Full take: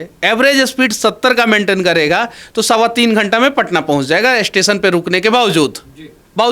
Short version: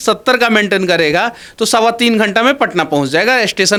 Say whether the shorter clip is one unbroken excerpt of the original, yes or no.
yes